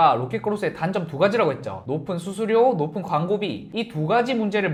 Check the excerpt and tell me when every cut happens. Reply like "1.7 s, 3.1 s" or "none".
none